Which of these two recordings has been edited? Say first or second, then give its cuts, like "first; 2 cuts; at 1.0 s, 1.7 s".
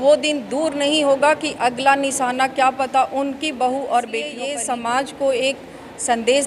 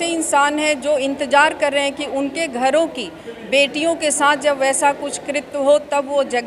first; 1 cut; at 4.5 s